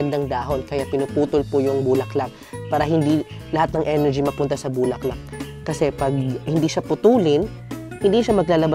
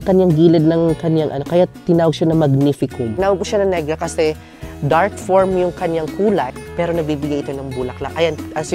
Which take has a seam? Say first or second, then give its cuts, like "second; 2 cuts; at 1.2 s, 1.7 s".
second; 2 cuts; at 3.1 s, 6.5 s